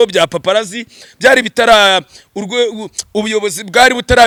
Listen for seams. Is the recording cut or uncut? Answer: uncut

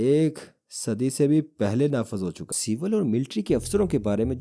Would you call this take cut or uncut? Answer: cut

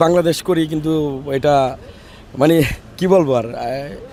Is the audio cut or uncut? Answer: uncut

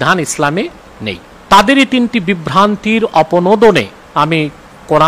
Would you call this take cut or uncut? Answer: cut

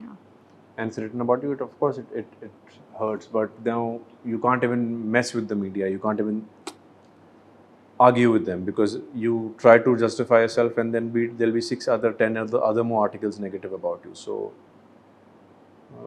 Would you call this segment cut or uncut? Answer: uncut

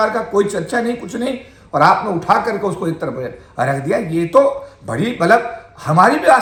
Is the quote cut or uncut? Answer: uncut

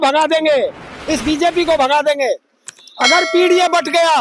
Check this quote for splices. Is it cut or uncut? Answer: uncut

